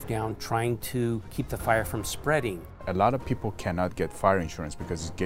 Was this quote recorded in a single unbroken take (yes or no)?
no